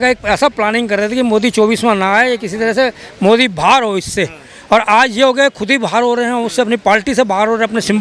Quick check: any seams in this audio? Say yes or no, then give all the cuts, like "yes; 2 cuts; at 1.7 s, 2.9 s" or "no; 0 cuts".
no; 0 cuts